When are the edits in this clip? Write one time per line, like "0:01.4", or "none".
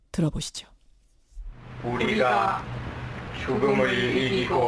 0:01.5